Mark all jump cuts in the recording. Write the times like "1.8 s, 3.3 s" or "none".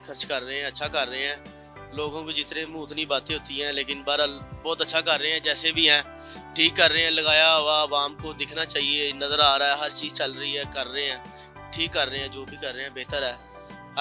none